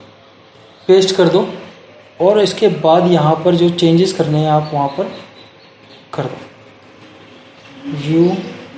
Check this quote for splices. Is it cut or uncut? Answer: uncut